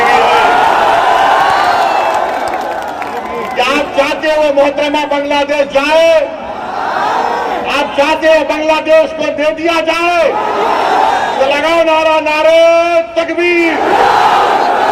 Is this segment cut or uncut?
uncut